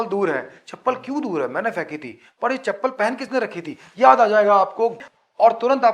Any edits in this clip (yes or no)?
yes